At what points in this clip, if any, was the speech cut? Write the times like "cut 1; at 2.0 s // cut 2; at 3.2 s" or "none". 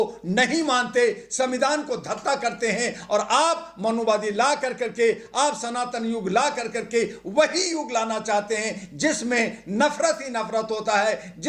none